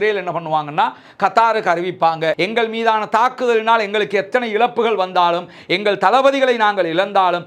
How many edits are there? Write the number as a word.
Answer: one